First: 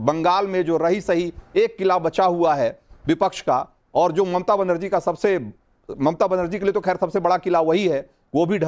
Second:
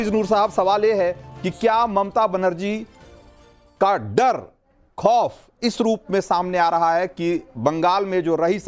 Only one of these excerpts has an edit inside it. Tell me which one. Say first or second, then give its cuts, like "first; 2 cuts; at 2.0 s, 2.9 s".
first; 1 cut; at 7.4 s